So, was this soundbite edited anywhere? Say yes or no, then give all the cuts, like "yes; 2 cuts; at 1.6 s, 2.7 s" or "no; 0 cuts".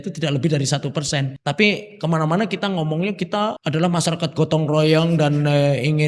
yes; 2 cuts; at 1.3 s, 3.6 s